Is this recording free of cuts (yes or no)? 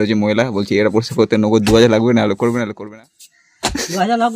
no